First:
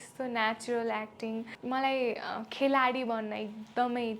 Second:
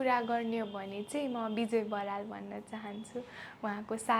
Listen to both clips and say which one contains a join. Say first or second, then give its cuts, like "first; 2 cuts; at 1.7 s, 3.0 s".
first; 1 cut; at 1.5 s